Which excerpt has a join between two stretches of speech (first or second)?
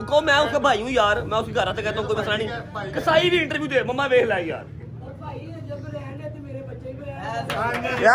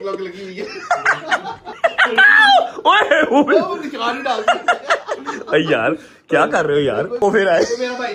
second